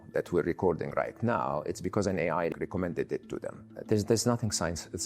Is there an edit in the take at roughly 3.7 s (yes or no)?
yes